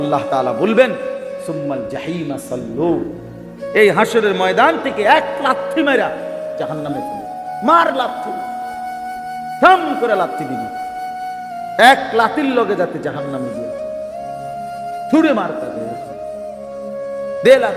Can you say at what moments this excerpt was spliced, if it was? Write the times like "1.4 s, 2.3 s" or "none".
8.1 s, 9.6 s, 10.5 s, 11.8 s

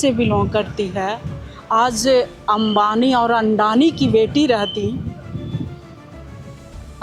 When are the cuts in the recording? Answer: none

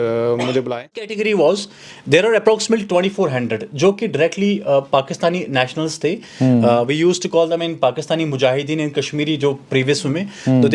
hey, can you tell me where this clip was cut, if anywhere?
1.1 s

